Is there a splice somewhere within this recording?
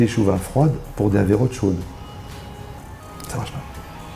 yes; 1 cut; at 3.0 s

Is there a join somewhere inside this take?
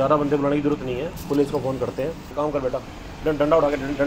yes; 1 cut; at 2.3 s

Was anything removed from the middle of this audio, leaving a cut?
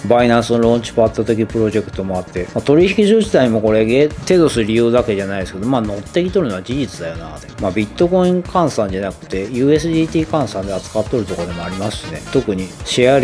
yes; 1 cut; at 12.1 s

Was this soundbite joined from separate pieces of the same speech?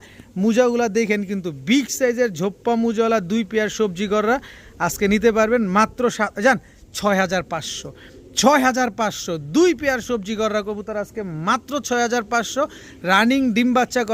no; 0 cuts

